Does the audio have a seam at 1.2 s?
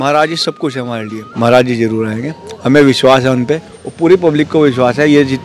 yes; 1 cut; at 1.2 s

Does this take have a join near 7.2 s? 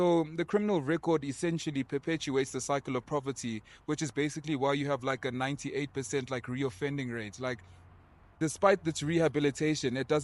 no; 0 cuts

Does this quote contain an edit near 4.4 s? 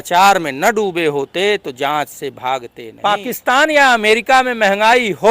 no; 1 cut; at 2.8 s

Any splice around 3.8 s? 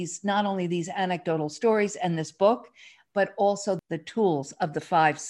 yes; 1 cut; at 3.8 s

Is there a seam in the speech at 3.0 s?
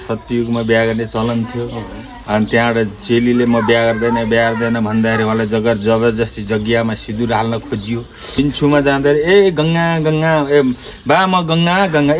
no; 1 cut; at 8.2 s

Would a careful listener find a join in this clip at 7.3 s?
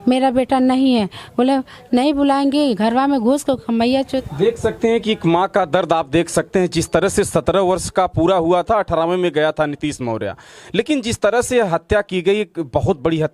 no; 1 cut; at 4.2 s

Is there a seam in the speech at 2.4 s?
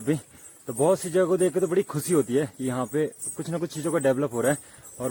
no; 0 cuts

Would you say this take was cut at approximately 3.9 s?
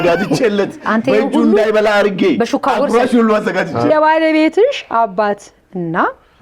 yes; 1 cut; at 3.9 s

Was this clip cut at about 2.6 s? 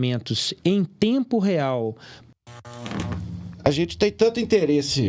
yes; 1 cut; at 2.6 s

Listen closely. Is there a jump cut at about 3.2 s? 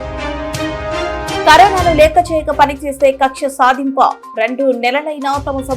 no; 1 cut; at 1.4 s

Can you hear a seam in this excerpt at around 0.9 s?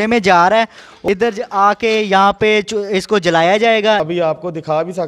yes; 2 cuts; at 0.9 s, 4.0 s

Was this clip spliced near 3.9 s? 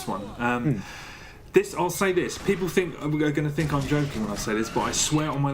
yes; 1 cut; at 3.9 s

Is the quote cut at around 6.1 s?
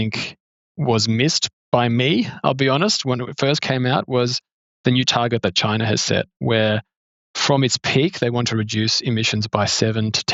no; 0 cuts

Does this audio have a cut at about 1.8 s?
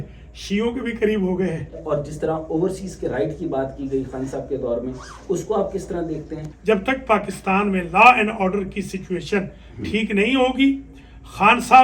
yes; 2 cuts; at 1.8 s, 6.5 s

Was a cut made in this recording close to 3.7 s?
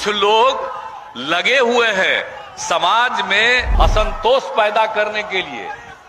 yes; 1 cut; at 3.7 s

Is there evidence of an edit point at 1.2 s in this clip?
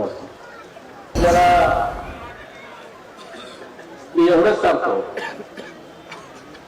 yes; 1 cut; at 1.2 s

